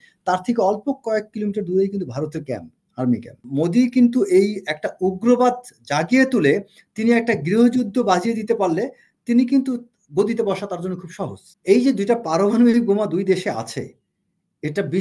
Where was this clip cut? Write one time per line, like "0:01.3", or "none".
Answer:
0:03.4
0:11.5